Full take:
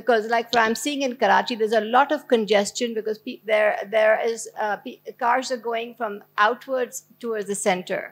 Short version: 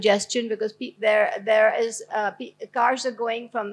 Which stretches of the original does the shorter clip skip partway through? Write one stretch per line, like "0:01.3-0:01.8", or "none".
none